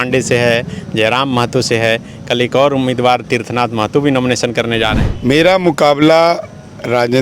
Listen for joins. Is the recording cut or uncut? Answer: cut